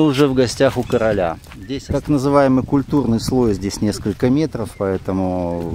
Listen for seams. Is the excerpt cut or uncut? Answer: cut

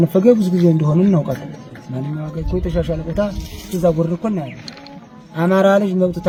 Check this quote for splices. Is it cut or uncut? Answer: uncut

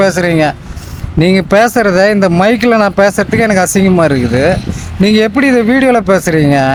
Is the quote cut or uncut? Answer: uncut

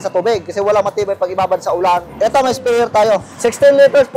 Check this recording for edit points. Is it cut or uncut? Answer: cut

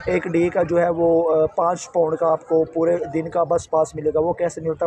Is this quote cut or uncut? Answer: uncut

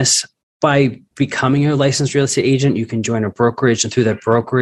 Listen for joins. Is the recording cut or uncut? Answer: cut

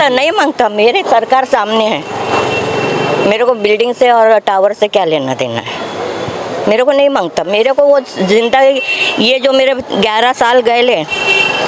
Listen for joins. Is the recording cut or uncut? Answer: uncut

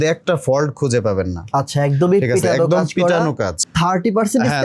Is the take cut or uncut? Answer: cut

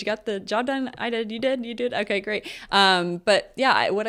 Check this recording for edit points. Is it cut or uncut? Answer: uncut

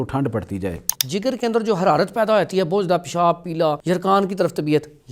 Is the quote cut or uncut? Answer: cut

